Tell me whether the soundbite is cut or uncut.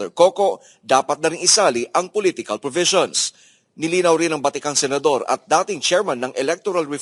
uncut